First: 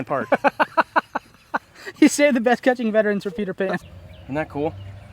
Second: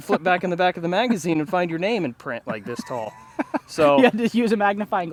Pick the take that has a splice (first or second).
first